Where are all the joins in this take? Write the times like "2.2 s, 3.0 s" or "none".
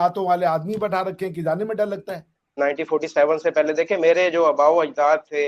2.6 s